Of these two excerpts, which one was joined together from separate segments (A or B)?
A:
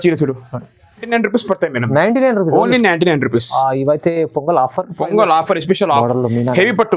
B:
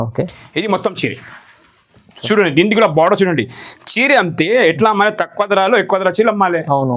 A